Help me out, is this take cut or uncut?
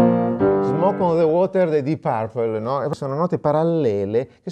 cut